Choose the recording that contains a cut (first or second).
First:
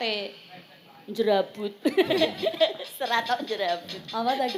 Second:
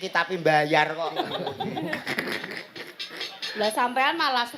second